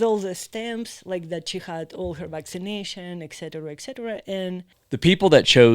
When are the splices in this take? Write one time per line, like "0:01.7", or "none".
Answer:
0:04.7

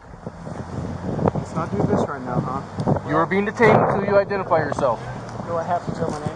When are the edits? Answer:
0:05.0

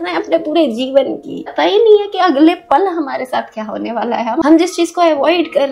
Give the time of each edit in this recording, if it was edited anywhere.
0:01.5
0:04.4

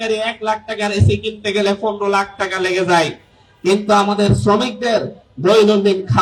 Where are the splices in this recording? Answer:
none

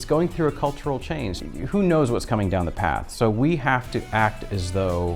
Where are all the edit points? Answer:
0:01.3

